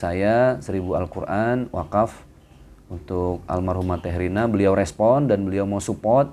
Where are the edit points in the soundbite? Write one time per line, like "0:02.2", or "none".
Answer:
none